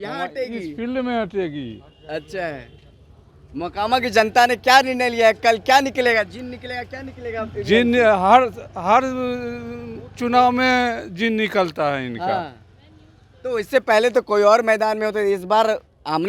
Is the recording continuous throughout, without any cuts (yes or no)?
yes